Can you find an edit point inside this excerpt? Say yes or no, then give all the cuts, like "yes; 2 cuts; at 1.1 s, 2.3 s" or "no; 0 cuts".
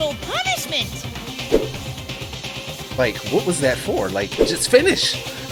no; 0 cuts